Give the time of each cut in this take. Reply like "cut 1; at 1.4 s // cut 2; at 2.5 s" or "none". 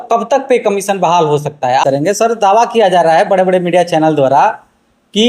cut 1; at 1.8 s